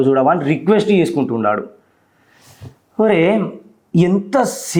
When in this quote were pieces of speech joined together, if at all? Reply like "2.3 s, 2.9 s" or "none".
none